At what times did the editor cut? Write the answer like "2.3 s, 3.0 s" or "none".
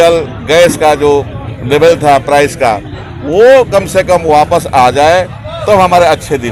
none

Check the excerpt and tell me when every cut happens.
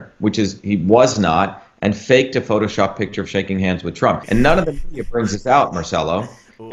4.2 s

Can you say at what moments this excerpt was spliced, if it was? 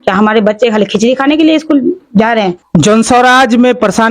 none

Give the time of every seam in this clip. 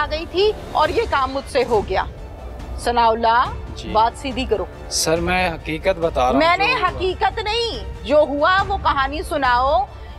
none

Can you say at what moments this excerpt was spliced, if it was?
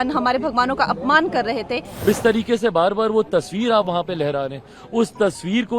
2.0 s

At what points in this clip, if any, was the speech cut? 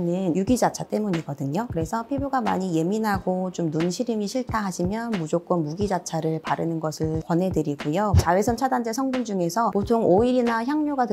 8.2 s, 9.7 s

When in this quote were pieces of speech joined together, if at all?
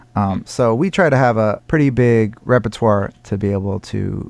1.6 s

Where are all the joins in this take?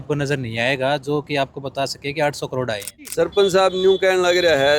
3.1 s

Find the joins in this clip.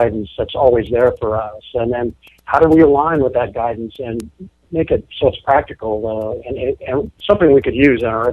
5.4 s

